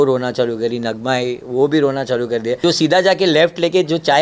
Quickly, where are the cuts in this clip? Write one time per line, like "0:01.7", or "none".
0:02.6